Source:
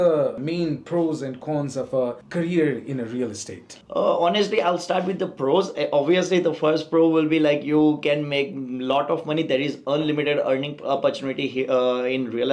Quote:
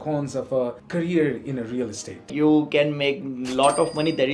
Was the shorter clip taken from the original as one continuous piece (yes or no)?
no